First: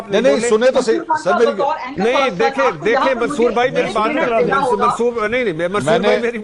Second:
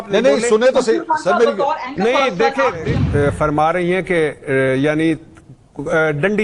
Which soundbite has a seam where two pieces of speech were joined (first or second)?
second